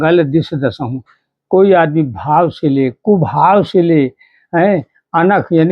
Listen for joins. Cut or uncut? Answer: uncut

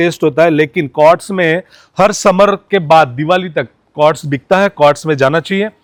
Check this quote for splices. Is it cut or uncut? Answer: uncut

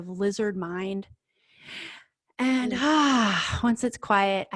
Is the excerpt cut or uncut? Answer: uncut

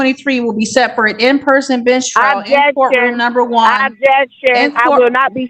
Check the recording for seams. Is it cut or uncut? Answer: uncut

